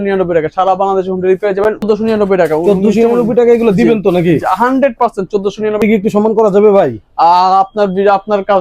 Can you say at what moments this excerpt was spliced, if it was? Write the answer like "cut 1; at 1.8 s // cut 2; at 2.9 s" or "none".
cut 1; at 1.8 s // cut 2; at 5.8 s